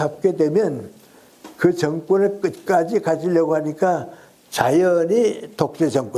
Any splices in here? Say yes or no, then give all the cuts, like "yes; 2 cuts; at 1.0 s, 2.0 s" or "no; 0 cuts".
no; 0 cuts